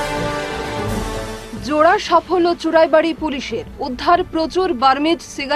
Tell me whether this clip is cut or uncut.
uncut